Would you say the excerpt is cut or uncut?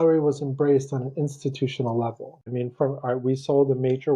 cut